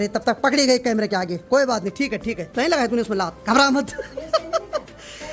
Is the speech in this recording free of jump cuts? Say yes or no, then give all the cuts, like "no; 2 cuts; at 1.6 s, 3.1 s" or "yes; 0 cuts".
yes; 0 cuts